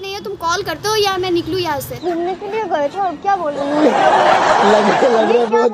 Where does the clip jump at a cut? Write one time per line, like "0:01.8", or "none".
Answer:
0:01.9